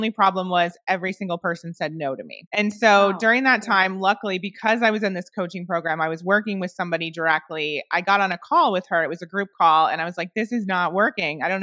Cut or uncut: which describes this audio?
cut